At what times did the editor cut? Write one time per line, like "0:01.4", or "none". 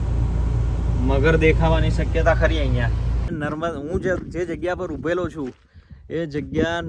0:03.3